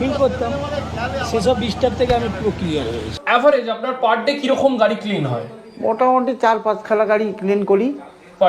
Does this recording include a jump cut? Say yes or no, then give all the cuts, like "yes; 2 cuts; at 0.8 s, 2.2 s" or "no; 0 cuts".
yes; 1 cut; at 3.1 s